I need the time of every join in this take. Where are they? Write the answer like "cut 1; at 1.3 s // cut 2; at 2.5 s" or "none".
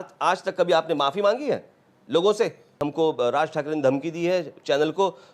cut 1; at 2.8 s